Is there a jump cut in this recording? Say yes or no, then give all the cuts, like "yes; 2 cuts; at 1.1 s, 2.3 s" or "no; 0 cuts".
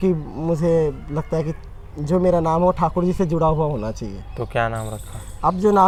no; 0 cuts